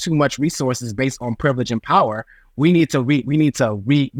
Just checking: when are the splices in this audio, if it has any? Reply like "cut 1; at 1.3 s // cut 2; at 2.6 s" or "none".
none